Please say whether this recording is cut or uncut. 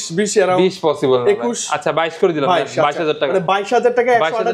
uncut